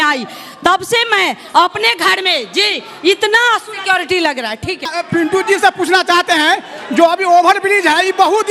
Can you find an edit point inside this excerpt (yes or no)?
yes